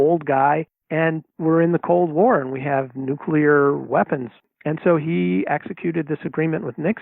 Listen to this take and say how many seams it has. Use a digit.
1